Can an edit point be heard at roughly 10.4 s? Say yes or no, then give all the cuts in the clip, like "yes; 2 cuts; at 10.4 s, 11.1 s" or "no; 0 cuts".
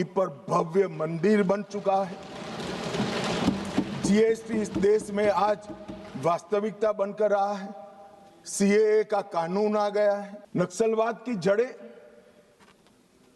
yes; 1 cut; at 10.4 s